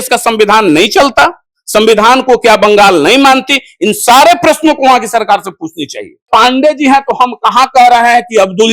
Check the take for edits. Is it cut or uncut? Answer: cut